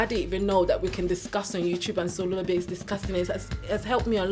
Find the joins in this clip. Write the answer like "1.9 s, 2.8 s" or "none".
none

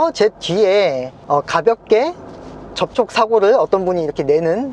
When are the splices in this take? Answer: 1.1 s

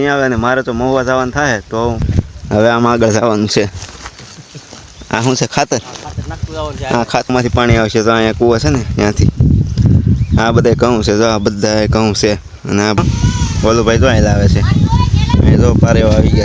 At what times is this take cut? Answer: 2.0 s, 7.3 s, 13.0 s

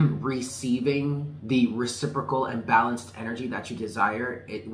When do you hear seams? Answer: 1.3 s

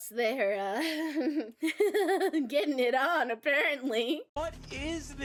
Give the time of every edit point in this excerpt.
none

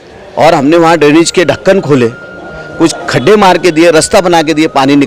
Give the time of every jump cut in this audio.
none

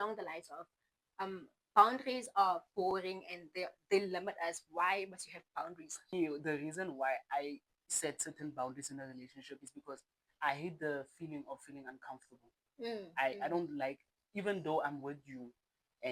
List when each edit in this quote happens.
6.1 s

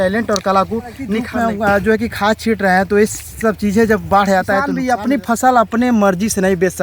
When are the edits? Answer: 1.3 s, 4.8 s

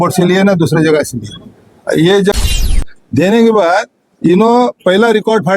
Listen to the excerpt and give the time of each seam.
2.7 s

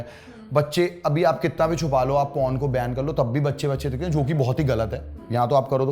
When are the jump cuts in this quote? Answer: none

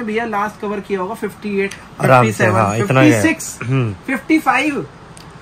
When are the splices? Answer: none

